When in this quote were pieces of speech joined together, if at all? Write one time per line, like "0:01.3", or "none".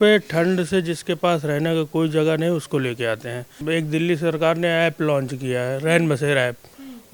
0:03.5